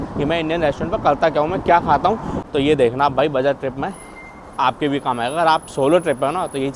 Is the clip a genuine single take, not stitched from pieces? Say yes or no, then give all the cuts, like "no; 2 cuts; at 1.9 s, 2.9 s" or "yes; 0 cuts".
no; 1 cut; at 2.4 s